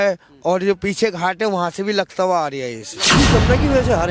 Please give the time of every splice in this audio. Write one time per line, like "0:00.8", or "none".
0:03.1